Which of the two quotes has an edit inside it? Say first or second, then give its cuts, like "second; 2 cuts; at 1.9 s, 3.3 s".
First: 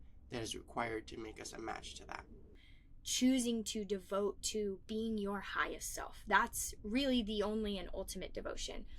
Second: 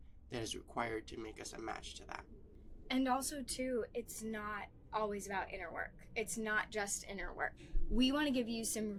first; 1 cut; at 2.7 s